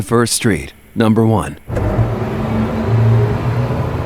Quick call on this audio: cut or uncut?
cut